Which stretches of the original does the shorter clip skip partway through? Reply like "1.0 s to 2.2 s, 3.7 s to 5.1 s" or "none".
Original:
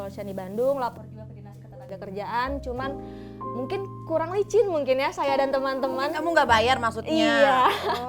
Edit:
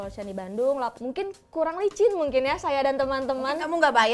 1.0 s to 3.5 s